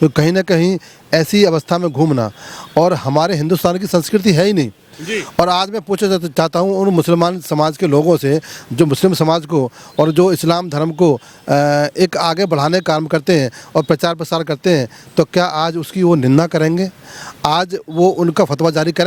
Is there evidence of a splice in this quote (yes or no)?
no